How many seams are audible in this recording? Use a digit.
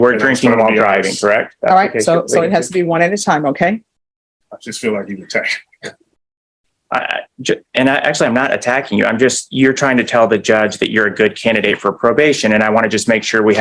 0